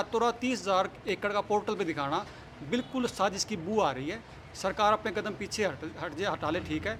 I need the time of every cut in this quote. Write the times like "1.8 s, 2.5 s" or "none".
none